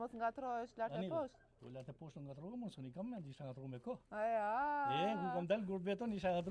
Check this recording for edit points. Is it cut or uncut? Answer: uncut